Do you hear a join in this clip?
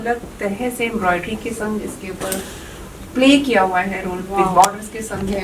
no; 0 cuts

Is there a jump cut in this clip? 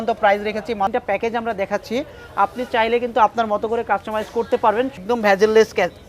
yes; 2 cuts; at 0.9 s, 5.0 s

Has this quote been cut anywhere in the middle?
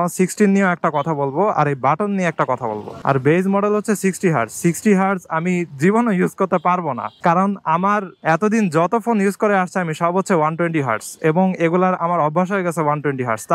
yes; 1 cut; at 2.9 s

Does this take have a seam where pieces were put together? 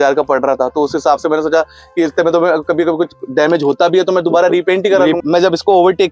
yes; 1 cut; at 5.2 s

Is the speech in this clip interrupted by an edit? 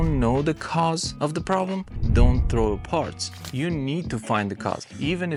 no; 0 cuts

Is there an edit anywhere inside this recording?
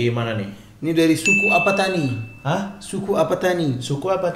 no; 0 cuts

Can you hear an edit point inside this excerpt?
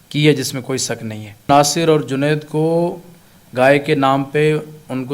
yes; 1 cut; at 1.5 s

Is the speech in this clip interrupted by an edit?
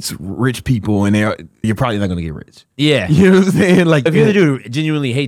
yes; 2 cuts; at 1.6 s, 4.1 s

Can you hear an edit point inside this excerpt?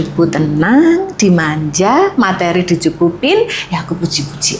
no; 0 cuts

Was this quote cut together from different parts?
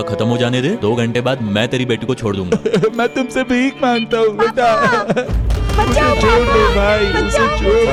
no; 0 cuts

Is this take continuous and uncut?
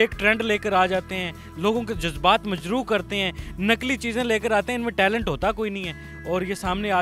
yes; 0 cuts

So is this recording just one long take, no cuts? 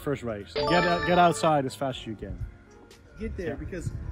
yes; 0 cuts

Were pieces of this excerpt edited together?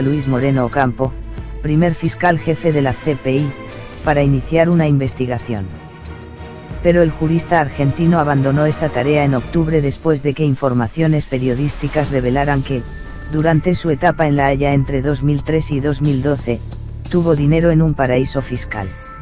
no; 0 cuts

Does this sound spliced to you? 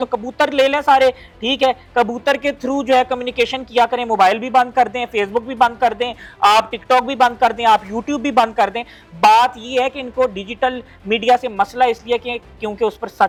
no; 0 cuts

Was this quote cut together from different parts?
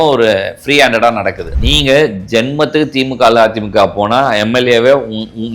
yes; 1 cut; at 1.5 s

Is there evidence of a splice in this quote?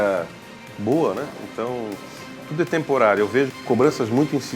yes; 1 cut; at 3.6 s

